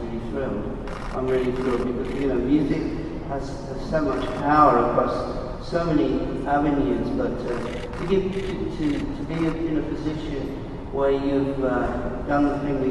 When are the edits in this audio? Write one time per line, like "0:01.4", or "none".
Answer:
0:04.9